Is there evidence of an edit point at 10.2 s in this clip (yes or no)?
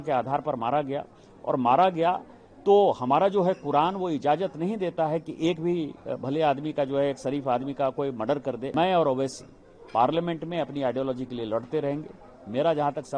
no